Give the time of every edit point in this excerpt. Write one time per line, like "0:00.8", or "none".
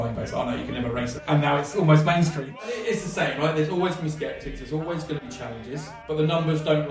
0:01.2
0:02.4
0:06.0